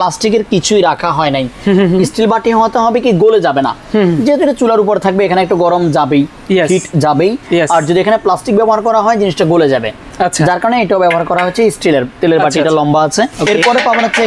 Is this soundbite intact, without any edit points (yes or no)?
yes